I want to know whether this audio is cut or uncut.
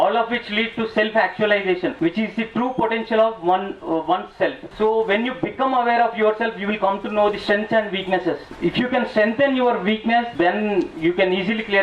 cut